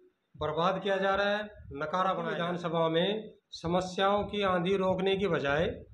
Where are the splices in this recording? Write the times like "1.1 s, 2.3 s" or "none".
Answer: 2.4 s